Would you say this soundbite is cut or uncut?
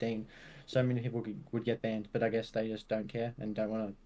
uncut